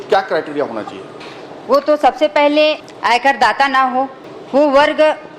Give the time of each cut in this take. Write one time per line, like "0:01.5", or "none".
0:02.9